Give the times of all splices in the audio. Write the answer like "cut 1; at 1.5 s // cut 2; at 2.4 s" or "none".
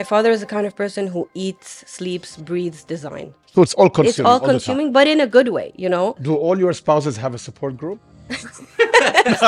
cut 1; at 3.4 s